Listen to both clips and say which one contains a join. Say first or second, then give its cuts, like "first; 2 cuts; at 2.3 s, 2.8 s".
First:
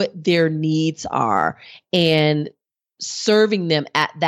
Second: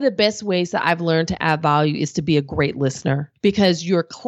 second; 1 cut; at 3.3 s